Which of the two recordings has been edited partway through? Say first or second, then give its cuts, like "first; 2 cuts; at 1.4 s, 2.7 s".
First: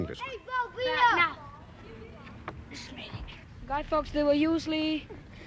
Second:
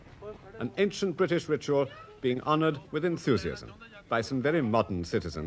first; 1 cut; at 3.2 s